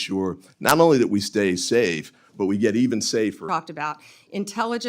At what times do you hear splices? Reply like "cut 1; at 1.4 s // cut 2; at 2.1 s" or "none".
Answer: cut 1; at 3.4 s